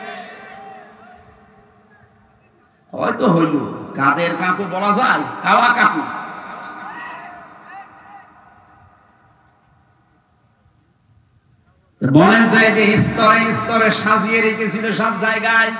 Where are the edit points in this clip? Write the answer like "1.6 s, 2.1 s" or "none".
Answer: none